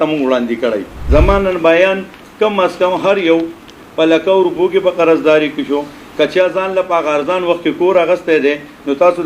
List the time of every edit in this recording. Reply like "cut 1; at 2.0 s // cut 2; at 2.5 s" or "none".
cut 1; at 0.9 s